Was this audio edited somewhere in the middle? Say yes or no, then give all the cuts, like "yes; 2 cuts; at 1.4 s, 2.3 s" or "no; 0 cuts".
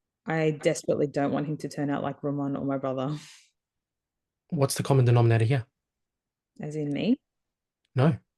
no; 0 cuts